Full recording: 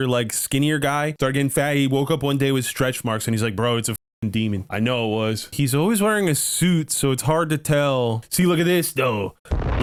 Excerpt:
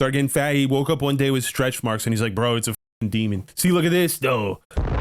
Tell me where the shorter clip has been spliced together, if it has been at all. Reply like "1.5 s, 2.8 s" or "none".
3.5 s